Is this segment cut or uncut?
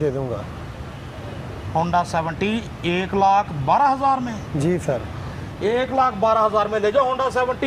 uncut